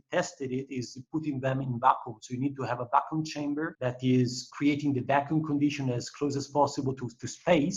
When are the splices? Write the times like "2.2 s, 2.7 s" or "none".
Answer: 3.7 s, 4.5 s